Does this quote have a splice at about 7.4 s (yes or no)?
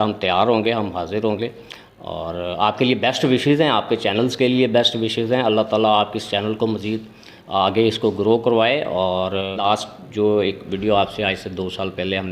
no